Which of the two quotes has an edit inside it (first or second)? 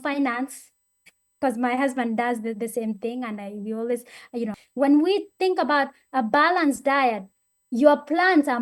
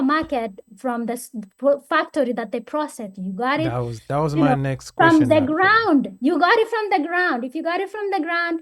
first